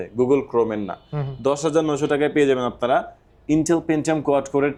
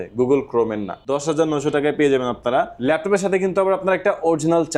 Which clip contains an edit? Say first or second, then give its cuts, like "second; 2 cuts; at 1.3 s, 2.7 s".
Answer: second; 2 cuts; at 0.9 s, 2.7 s